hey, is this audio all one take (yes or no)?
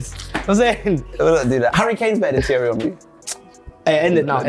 no